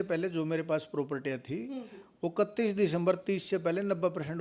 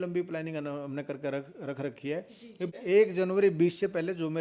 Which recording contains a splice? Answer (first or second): second